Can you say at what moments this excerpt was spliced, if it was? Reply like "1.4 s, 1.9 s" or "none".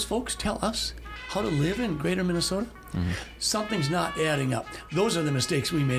none